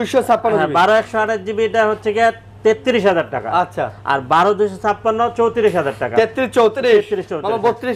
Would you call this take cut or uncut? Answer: uncut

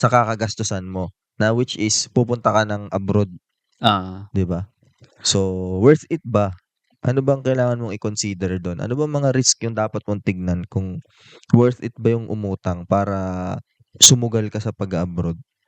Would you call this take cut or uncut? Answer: uncut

